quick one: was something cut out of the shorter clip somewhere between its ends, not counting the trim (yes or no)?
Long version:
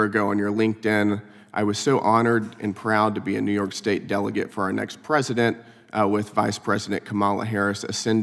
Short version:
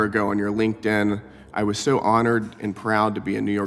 no